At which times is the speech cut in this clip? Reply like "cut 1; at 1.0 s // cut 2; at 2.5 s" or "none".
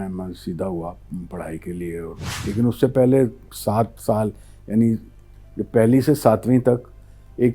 cut 1; at 2.3 s

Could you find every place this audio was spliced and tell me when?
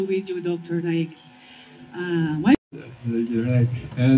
cut 1; at 2.5 s

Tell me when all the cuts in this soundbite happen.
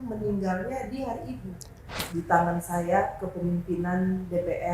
cut 1; at 2.0 s

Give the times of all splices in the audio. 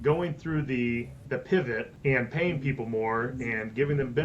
cut 1; at 1.1 s // cut 2; at 1.9 s

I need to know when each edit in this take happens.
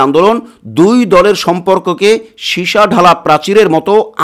none

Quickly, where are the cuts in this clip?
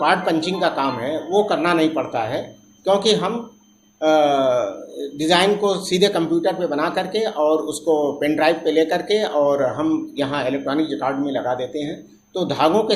none

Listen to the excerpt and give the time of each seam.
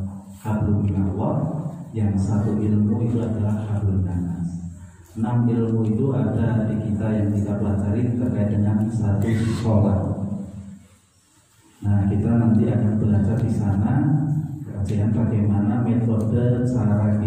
none

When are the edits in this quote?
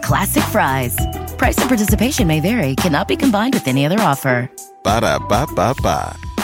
none

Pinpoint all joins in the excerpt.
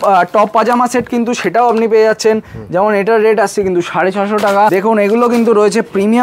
cut 1; at 4.7 s

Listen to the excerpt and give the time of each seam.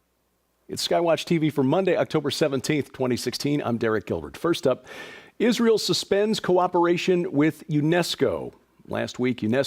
cut 1; at 8.4 s

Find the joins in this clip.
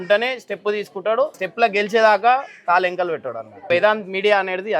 cut 1; at 1.4 s // cut 2; at 3.7 s

